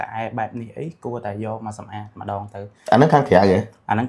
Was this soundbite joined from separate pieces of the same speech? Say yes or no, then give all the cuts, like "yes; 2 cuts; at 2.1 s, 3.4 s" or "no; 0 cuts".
no; 0 cuts